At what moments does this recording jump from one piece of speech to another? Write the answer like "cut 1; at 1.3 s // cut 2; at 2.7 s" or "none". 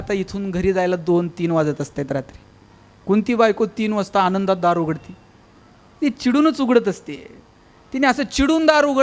none